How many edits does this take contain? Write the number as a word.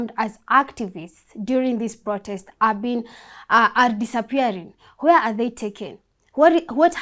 zero